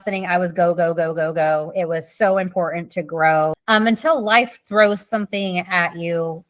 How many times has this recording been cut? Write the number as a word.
one